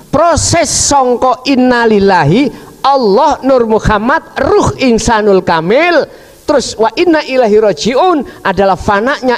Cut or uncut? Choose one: uncut